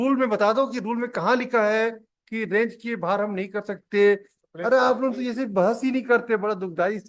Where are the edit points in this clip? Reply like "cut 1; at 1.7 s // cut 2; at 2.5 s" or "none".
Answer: cut 1; at 4.3 s